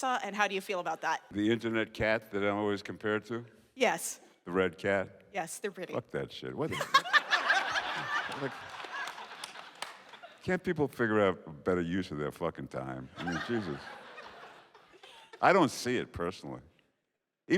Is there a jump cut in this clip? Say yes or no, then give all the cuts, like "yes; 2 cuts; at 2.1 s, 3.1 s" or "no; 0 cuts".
yes; 1 cut; at 1.3 s